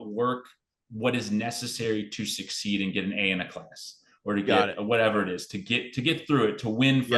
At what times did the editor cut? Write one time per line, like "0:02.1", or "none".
none